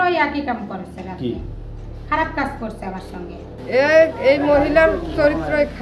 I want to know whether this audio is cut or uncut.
cut